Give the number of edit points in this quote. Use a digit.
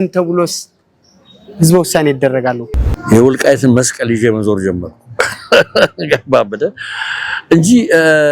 1